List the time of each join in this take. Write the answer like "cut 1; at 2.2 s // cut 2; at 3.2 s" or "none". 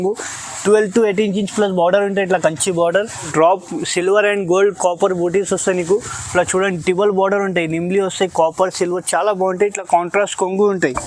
cut 1; at 3.3 s